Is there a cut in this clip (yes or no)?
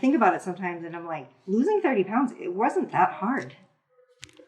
no